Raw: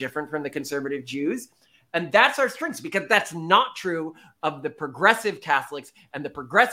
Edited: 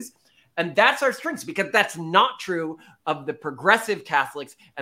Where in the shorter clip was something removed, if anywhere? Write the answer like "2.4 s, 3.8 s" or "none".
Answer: none